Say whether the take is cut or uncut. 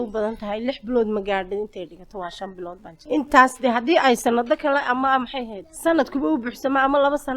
cut